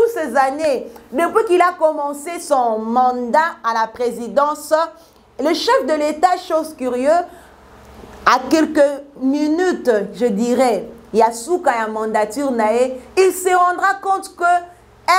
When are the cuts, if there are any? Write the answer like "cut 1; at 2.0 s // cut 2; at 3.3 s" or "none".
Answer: none